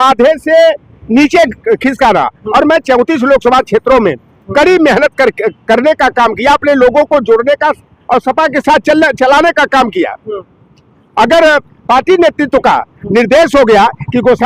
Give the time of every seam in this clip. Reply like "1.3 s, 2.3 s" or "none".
none

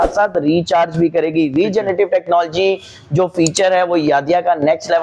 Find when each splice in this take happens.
none

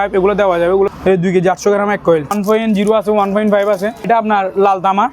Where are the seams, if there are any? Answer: 0.9 s, 2.3 s, 4.1 s

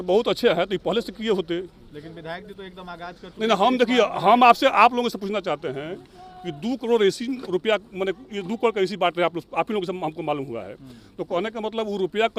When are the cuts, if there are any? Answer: none

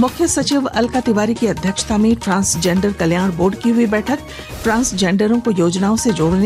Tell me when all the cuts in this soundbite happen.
none

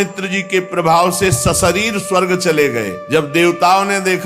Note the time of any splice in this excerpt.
3.0 s

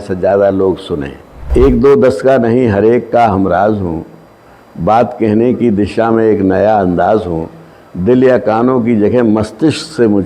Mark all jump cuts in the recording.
1.5 s

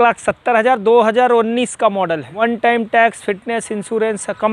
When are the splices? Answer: 2.4 s

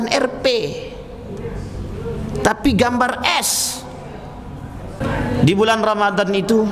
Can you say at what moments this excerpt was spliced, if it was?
5.0 s

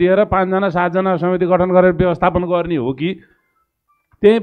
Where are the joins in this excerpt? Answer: none

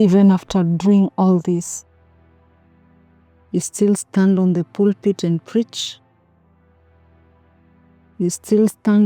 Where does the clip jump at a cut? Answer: 1.7 s, 3.5 s, 5.7 s, 8.2 s

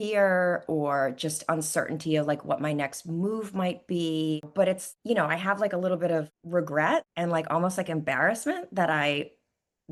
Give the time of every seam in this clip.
none

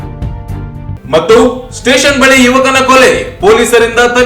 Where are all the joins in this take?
0.9 s

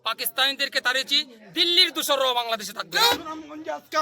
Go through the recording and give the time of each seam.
3.1 s

